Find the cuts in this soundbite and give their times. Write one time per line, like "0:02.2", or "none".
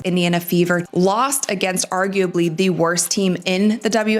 0:01.0

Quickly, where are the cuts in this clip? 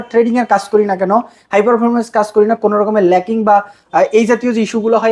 none

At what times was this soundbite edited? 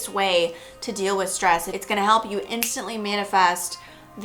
0:01.7

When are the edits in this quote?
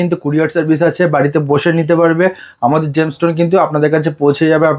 none

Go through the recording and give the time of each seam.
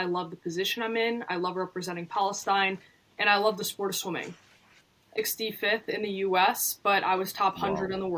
0:05.2

